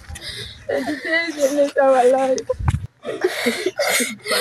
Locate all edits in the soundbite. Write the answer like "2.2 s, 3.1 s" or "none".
2.8 s